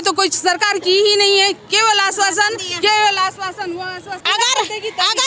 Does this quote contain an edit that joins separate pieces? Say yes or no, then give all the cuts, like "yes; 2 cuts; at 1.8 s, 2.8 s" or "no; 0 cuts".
yes; 1 cut; at 4.2 s